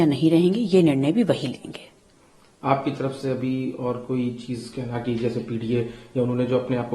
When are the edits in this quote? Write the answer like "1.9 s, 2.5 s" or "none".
none